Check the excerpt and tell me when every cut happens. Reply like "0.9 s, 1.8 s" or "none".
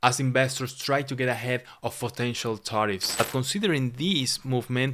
3.1 s